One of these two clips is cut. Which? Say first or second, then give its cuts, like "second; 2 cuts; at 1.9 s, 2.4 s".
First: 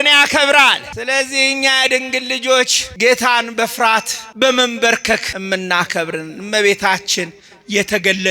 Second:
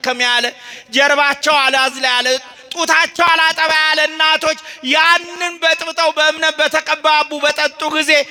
first; 4 cuts; at 0.9 s, 2.8 s, 4.2 s, 5.3 s